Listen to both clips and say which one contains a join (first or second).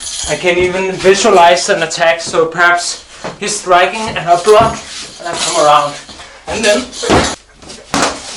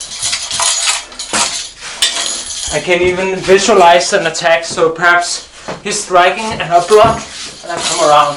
first